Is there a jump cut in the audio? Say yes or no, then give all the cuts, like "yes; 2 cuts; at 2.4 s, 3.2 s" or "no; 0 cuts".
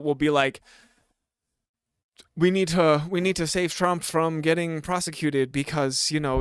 no; 0 cuts